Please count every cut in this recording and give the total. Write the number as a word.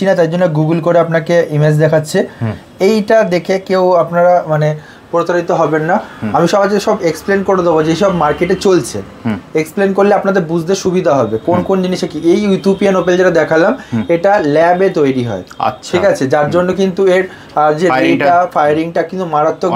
zero